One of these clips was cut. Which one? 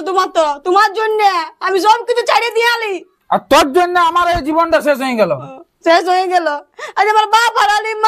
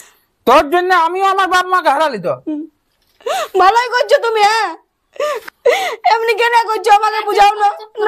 second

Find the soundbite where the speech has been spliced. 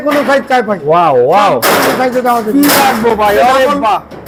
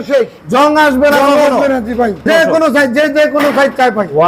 second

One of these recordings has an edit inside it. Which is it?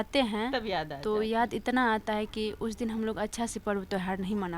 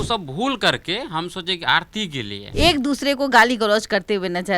second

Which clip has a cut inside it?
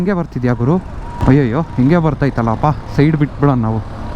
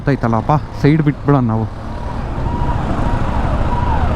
first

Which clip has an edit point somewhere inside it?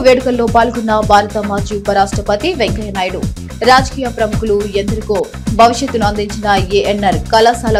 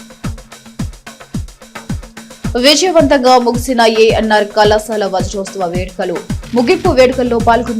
second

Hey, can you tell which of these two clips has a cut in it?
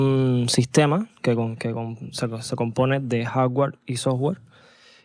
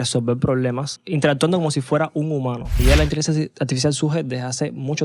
second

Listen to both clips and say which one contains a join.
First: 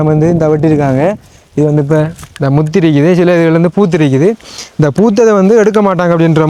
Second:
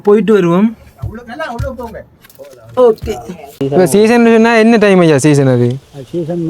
second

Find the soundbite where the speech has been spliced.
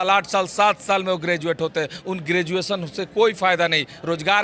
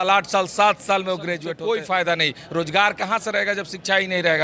second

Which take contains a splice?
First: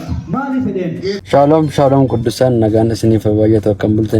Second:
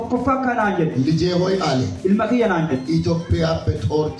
first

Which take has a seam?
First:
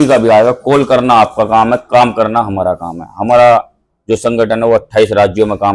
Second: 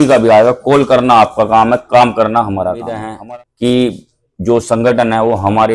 second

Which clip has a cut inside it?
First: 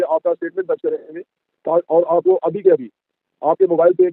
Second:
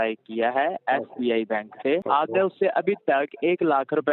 second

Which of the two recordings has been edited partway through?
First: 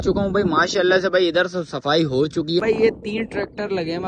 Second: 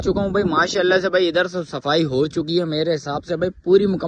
first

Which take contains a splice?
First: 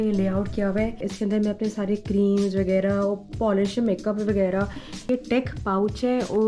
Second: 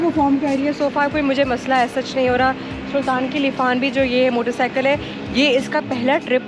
first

